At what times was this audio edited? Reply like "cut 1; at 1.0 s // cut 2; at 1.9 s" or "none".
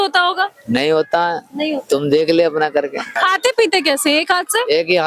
cut 1; at 3.2 s